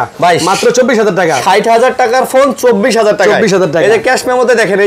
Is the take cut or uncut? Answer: uncut